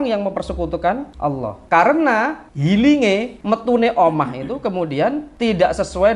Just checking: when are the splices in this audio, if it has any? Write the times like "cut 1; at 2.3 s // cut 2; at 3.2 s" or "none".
cut 1; at 1.3 s // cut 2; at 2.5 s // cut 3; at 3.3 s // cut 4; at 5.3 s

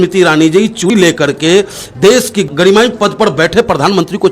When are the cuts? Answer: cut 1; at 0.9 s // cut 2; at 2.4 s

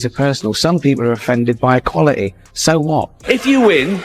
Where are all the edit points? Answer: cut 1; at 3.1 s

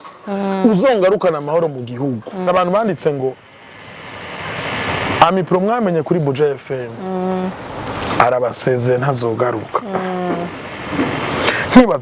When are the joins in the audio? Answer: cut 1; at 2.5 s

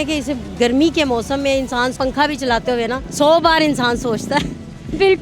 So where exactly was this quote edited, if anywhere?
cut 1; at 2.0 s // cut 2; at 3.0 s

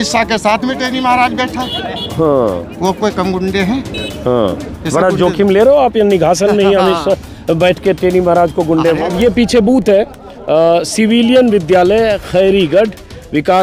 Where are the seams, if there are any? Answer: cut 1; at 9.0 s

